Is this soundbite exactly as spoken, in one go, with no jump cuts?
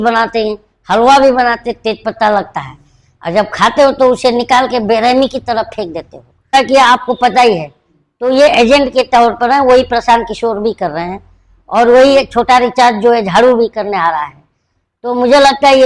no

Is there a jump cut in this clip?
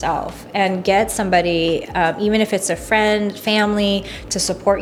no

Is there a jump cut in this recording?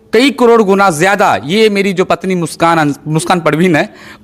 no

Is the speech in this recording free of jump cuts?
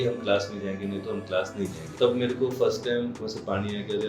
no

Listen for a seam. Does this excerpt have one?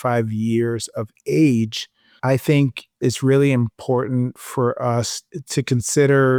no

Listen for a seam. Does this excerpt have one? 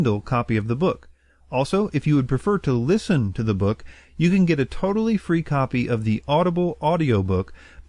no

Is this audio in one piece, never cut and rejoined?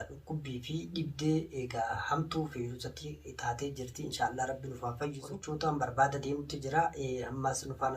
no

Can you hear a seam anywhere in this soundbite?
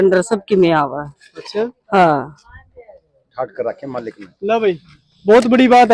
no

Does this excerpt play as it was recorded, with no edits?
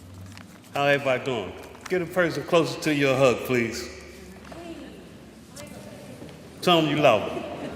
yes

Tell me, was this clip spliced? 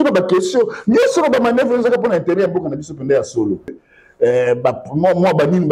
yes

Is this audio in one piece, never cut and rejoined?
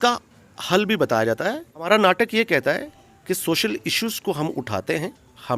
no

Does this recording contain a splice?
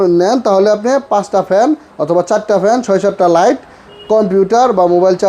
no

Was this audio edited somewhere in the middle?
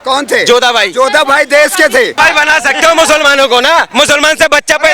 yes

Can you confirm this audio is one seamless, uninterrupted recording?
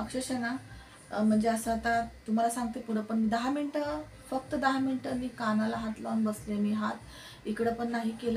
yes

